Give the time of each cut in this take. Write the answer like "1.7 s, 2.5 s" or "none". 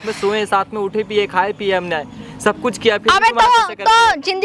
none